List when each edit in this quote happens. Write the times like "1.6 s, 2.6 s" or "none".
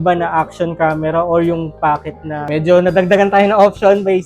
2.5 s